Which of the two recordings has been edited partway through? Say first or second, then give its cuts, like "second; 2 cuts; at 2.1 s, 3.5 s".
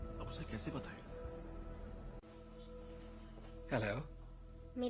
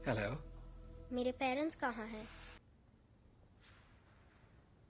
second; 1 cut; at 2.6 s